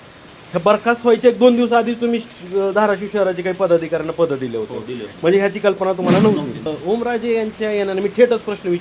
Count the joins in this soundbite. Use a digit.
1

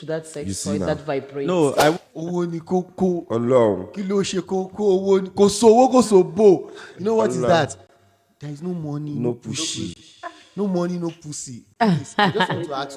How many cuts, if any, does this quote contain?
1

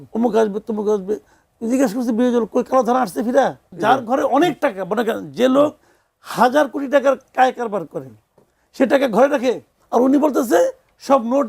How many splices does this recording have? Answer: 2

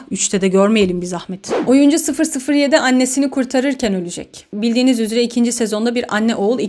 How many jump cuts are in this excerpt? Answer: 0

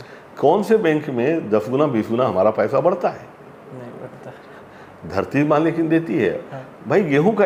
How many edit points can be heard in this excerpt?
0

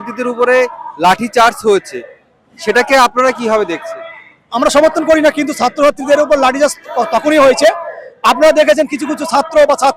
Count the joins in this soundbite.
0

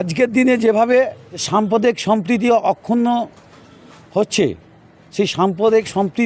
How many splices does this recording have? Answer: 1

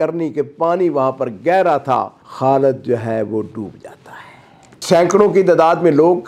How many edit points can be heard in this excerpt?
1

